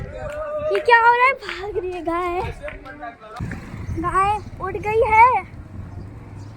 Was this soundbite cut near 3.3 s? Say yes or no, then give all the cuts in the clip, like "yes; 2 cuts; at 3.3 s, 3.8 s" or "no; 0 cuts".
yes; 1 cut; at 3.3 s